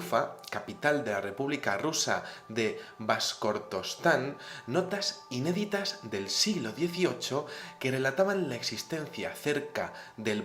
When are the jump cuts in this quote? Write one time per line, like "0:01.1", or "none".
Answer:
0:01.6